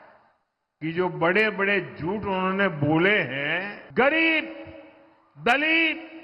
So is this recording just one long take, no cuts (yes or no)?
no